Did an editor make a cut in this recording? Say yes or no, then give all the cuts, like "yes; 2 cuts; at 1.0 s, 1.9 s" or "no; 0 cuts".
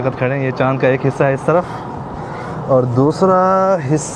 no; 0 cuts